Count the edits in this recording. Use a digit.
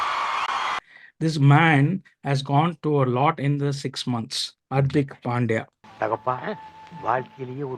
2